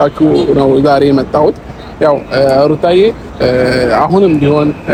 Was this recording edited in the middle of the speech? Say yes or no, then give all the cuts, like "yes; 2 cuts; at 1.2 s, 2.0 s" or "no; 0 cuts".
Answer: no; 0 cuts